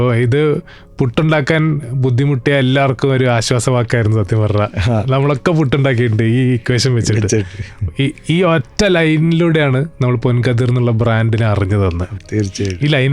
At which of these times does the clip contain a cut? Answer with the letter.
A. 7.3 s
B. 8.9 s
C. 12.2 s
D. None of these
C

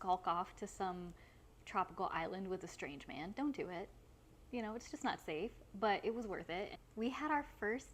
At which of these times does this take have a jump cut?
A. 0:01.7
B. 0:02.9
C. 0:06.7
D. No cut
C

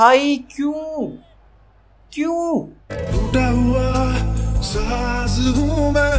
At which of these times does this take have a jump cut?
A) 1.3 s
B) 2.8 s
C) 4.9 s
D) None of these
D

